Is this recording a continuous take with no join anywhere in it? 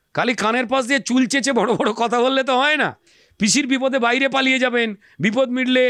yes; 0 cuts

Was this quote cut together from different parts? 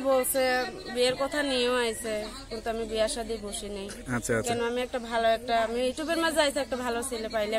no; 0 cuts

